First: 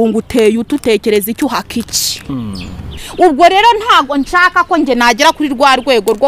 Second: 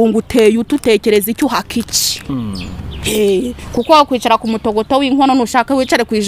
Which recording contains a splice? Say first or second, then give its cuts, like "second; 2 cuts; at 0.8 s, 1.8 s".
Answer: first; 1 cut; at 3.0 s